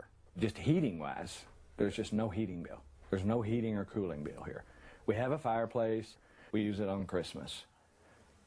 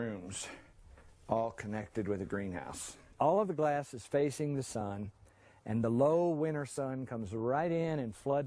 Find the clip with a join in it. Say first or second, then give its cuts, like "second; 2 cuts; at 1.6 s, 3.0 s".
first; 1 cut; at 7.5 s